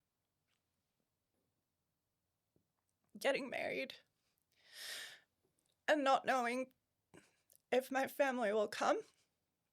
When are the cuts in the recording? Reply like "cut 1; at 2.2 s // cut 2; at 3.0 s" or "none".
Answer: cut 1; at 1.3 s